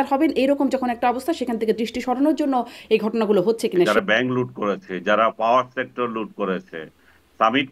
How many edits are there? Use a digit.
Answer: 1